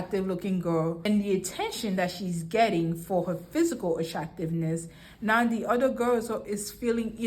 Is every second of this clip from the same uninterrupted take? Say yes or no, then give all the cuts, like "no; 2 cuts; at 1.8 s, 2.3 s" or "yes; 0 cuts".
no; 1 cut; at 1.1 s